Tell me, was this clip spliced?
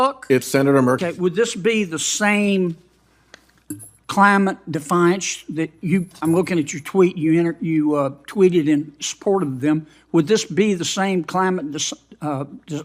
yes; 1 cut; at 1.0 s

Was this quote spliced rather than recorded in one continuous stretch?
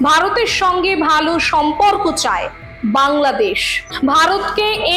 yes; 1 cut; at 3.9 s

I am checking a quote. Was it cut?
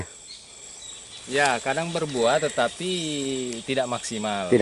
no; 0 cuts

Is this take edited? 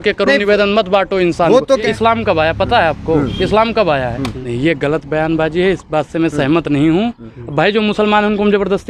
yes; 2 cuts; at 1.9 s, 4.4 s

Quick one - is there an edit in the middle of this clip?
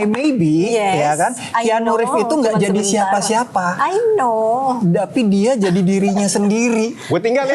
no; 0 cuts

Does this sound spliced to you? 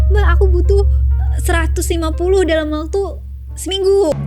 no; 0 cuts

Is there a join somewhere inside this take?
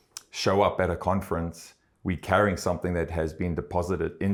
no; 0 cuts

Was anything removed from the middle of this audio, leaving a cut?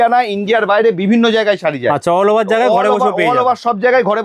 no; 0 cuts

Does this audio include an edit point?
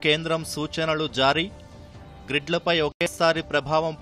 no; 0 cuts

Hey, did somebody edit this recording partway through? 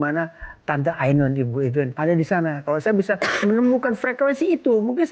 yes; 1 cut; at 1.9 s

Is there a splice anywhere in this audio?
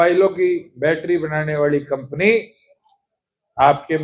no; 0 cuts

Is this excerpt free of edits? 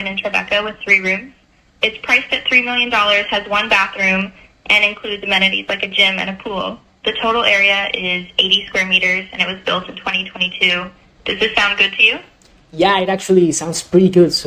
yes; 0 cuts

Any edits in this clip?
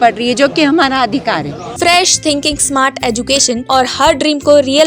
yes; 2 cuts; at 1.6 s, 3.6 s

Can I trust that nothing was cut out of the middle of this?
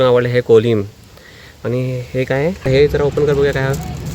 no; 1 cut; at 2.7 s

